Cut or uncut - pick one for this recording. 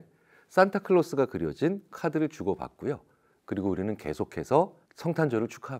cut